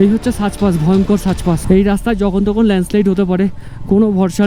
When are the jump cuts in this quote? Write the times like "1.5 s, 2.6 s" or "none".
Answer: 1.6 s